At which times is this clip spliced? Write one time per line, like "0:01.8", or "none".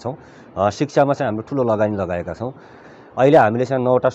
0:02.7